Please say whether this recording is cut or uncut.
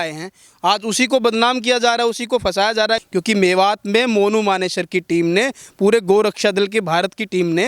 cut